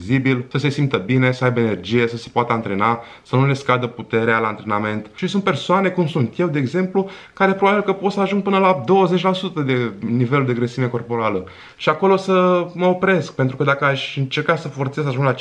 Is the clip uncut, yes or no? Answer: no